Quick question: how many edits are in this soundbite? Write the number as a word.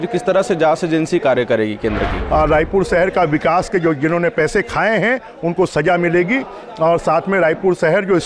one